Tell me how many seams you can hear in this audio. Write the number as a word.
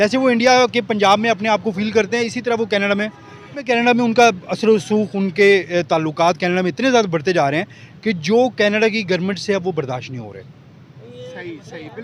one